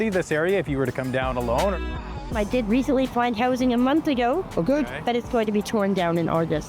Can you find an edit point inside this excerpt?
yes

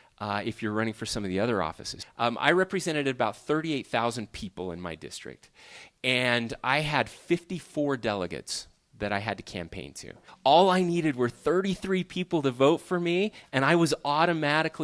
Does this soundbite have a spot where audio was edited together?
yes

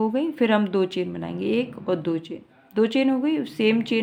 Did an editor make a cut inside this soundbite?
no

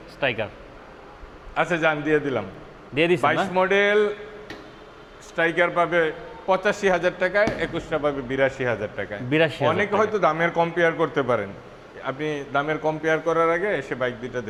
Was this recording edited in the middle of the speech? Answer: no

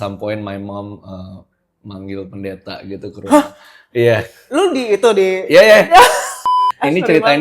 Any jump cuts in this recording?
yes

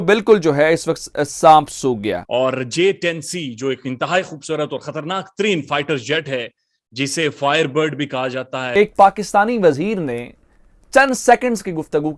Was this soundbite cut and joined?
yes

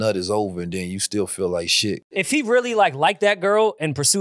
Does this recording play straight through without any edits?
no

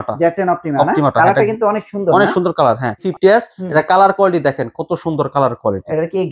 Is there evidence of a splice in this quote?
yes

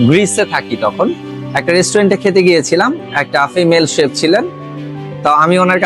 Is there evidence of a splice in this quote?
no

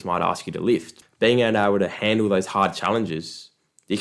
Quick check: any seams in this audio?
yes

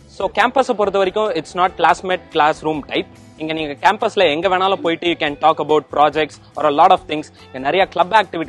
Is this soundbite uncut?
yes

